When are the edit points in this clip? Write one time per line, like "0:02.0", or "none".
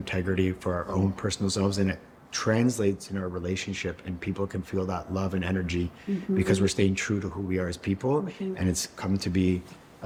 none

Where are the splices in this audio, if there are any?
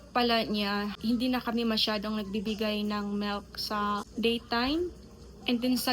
0:00.9

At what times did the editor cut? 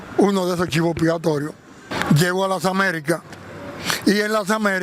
0:01.9

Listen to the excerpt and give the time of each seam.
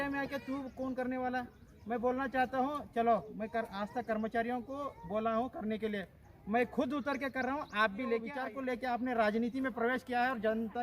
0:08.3

